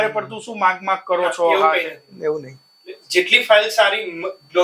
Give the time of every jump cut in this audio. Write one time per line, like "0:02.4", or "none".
none